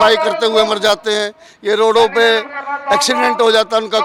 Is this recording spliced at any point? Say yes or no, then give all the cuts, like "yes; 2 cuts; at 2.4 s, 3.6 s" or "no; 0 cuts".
no; 0 cuts